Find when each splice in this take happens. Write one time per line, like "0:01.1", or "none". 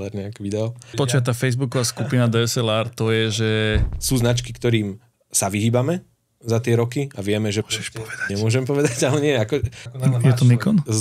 0:01.1
0:03.9
0:09.8